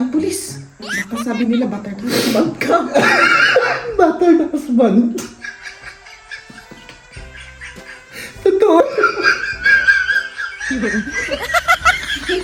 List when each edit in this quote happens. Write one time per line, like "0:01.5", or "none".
none